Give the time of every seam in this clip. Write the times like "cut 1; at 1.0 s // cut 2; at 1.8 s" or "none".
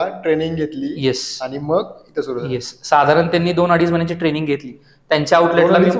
none